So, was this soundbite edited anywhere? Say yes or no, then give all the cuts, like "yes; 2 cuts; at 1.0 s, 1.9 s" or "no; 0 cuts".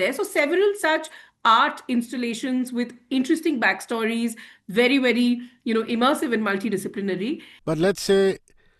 yes; 1 cut; at 7.5 s